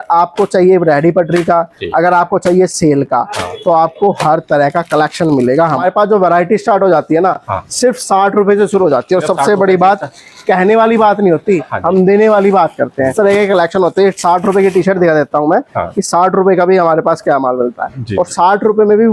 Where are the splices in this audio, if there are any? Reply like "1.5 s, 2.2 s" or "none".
5.8 s, 13.1 s